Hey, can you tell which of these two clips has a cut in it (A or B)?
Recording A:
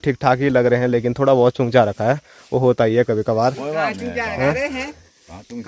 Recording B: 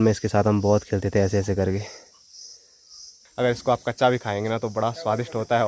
B